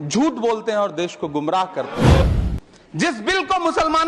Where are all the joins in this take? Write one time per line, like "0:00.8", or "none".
0:02.2